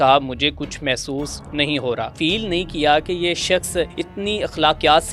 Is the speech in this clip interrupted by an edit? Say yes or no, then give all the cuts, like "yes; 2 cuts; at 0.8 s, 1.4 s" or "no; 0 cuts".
yes; 2 cuts; at 2.1 s, 4.0 s